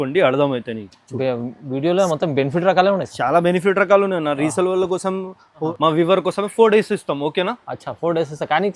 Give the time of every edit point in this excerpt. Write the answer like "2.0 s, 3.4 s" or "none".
5.7 s